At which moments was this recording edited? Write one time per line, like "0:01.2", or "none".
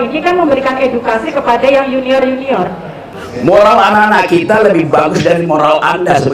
0:03.1